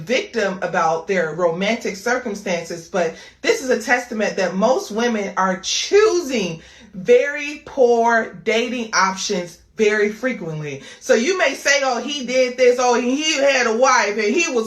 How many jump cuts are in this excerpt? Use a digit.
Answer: 2